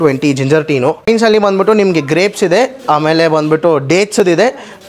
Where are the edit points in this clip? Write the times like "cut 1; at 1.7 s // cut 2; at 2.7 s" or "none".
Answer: cut 1; at 1.1 s